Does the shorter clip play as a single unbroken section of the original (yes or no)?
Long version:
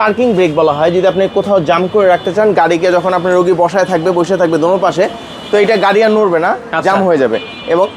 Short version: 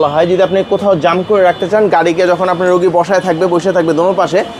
yes